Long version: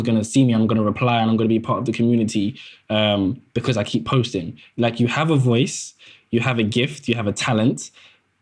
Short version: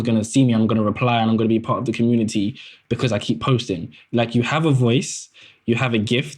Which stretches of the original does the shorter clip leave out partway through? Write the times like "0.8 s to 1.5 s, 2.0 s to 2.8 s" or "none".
2.8 s to 3.4 s